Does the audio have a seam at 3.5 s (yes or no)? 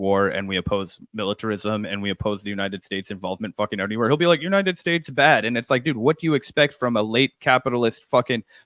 no